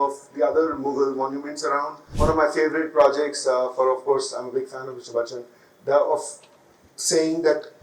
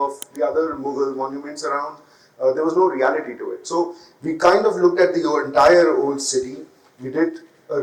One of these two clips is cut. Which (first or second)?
first